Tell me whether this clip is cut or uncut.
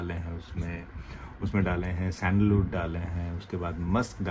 uncut